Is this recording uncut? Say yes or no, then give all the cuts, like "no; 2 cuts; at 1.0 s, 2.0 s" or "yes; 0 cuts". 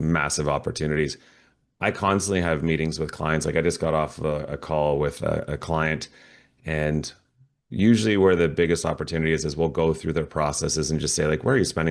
yes; 0 cuts